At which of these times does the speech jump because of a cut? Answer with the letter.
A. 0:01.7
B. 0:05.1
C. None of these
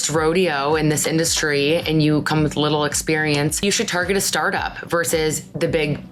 C